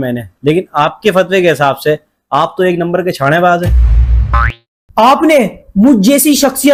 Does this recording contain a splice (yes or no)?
no